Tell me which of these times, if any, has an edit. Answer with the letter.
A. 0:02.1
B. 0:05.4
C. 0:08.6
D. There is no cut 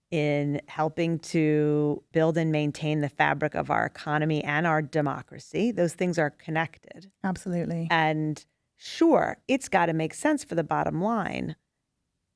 A